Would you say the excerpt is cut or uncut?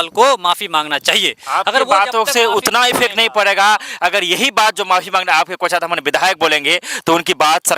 uncut